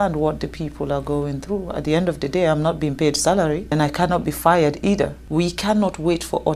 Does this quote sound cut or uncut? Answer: cut